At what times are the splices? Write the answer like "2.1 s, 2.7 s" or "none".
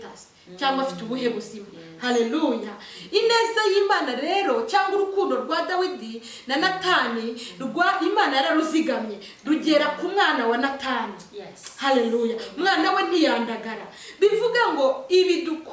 none